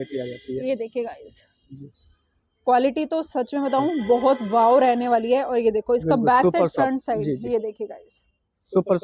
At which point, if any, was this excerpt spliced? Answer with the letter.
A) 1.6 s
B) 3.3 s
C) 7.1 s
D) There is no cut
D